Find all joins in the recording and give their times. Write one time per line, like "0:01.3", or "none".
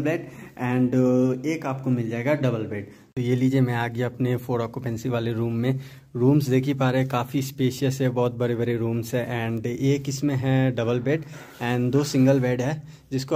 none